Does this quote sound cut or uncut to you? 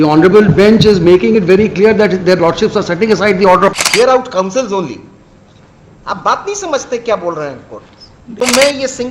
cut